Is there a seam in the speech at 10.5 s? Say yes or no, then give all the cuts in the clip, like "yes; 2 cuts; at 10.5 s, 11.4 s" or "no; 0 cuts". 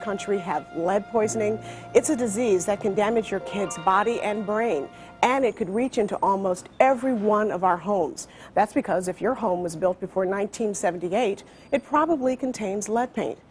yes; 1 cut; at 10.5 s